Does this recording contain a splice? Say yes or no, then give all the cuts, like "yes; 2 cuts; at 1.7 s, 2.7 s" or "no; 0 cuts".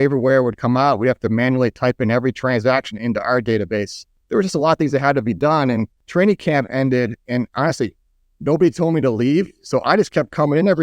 yes; 2 cuts; at 4.0 s, 6.0 s